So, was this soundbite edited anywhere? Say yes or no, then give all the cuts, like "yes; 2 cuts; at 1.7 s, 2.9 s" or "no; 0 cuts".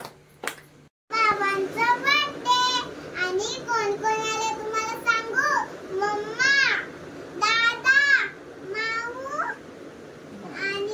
yes; 1 cut; at 1.0 s